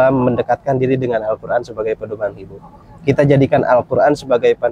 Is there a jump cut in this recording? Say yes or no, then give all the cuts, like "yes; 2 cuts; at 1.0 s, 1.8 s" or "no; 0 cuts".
no; 0 cuts